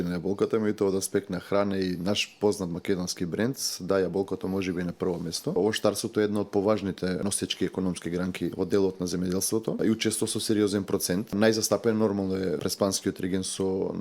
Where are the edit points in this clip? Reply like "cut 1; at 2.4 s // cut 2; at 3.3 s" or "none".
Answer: cut 1; at 5.6 s // cut 2; at 7.2 s // cut 3; at 8.5 s // cut 4; at 9.8 s // cut 5; at 11.3 s // cut 6; at 12.6 s